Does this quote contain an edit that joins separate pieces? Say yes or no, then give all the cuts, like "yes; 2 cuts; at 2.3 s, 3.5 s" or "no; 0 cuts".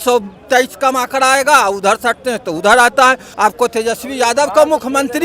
yes; 1 cut; at 3.3 s